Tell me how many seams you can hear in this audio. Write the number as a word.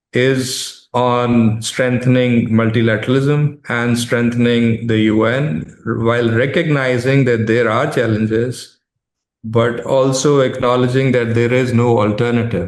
zero